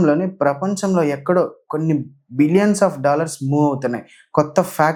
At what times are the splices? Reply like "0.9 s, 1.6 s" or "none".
none